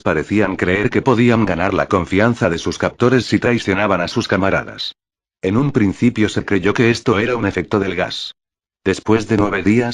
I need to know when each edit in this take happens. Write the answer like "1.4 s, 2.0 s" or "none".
7.3 s